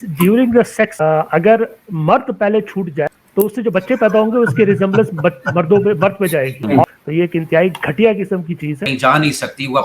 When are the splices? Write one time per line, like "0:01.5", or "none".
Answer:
0:06.8
0:08.9

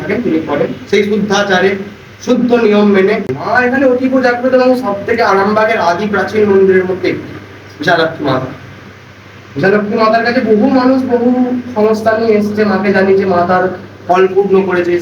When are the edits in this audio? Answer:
0:03.4

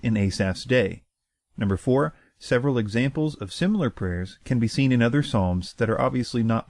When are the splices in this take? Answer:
0:03.4

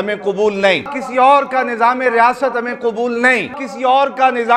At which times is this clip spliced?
0:01.0
0:03.7

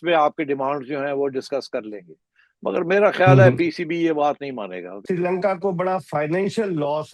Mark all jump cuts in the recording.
0:04.9

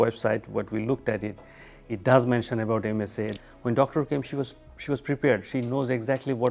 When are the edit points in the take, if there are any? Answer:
0:03.3

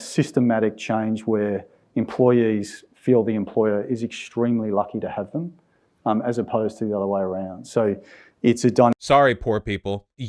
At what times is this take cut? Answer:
none

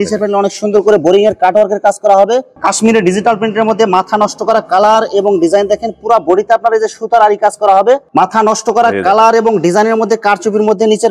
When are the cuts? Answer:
0:02.6
0:08.1

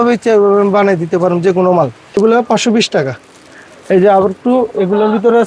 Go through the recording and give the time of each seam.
0:02.0

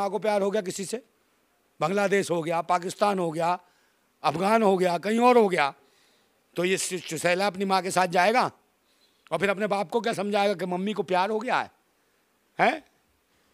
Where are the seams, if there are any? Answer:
none

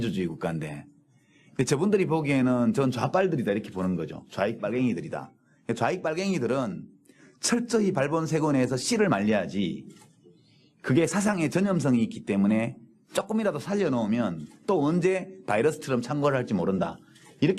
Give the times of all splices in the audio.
0:12.1

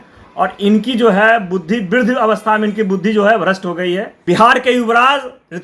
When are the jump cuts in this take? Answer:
0:04.1

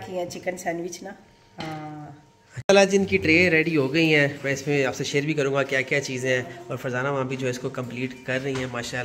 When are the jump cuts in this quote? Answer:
0:02.6

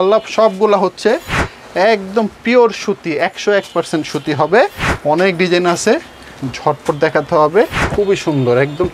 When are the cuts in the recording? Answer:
0:04.9
0:07.8

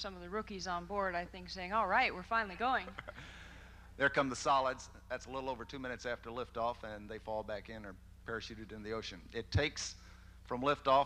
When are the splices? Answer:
0:08.3

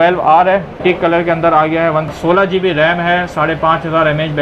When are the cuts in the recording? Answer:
0:00.8
0:02.1

